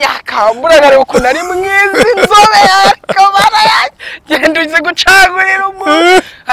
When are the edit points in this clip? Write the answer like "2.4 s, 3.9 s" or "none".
none